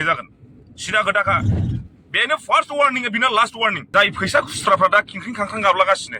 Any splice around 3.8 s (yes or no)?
yes